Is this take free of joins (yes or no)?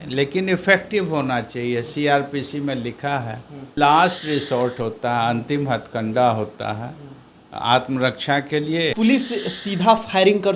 no